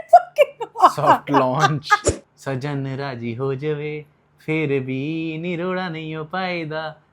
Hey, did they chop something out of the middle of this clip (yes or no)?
yes